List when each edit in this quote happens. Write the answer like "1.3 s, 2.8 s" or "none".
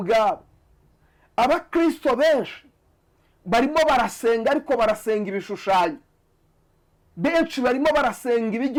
none